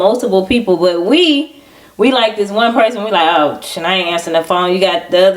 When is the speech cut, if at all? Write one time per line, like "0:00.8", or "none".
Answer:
none